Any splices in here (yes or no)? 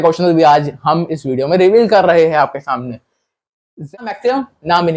yes